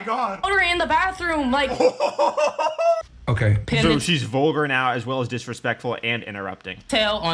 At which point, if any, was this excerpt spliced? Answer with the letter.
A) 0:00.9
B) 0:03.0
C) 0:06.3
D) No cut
B